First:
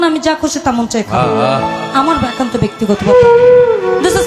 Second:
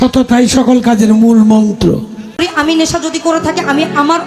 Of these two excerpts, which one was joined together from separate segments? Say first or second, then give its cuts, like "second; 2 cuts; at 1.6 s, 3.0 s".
second; 1 cut; at 2.4 s